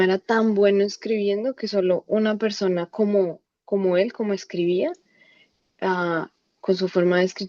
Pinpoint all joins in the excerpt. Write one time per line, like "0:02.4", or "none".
none